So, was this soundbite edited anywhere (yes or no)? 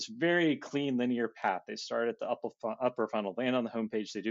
no